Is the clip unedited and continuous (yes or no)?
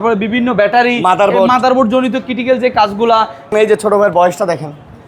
no